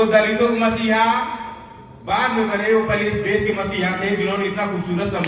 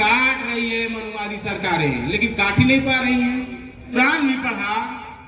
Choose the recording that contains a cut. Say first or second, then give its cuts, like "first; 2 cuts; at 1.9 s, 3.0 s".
second; 1 cut; at 3.9 s